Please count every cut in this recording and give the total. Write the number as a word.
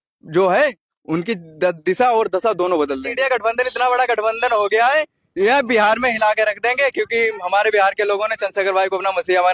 one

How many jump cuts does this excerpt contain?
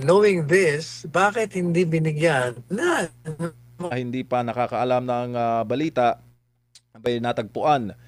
zero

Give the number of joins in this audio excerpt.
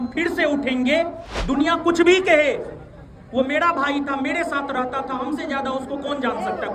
one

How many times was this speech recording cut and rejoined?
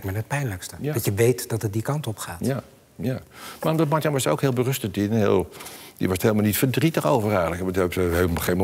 zero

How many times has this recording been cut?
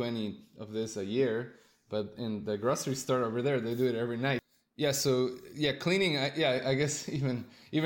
one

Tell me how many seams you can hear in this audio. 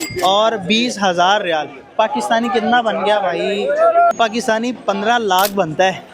one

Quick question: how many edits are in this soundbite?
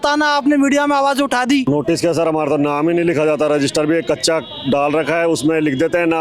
one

